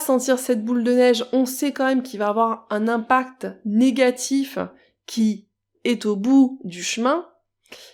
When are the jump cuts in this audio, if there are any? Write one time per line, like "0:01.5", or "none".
none

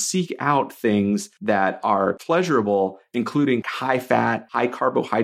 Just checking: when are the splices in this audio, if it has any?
0:01.3
0:02.2
0:04.2

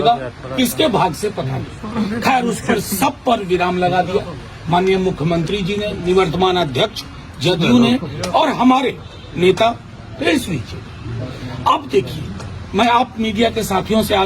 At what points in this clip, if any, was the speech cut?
none

